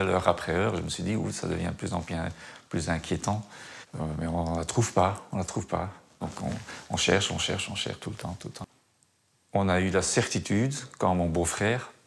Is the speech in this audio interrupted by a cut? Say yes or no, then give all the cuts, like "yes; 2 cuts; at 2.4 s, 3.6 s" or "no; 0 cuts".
yes; 1 cut; at 8.7 s